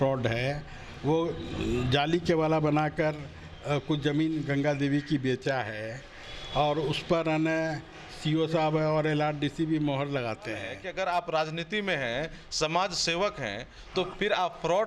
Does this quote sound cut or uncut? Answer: cut